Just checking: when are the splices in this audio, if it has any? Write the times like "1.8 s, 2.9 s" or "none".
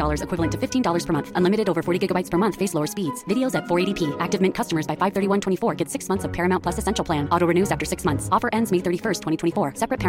none